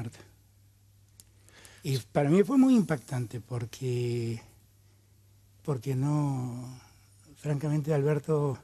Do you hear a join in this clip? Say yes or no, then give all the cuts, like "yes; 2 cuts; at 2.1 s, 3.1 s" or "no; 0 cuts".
no; 0 cuts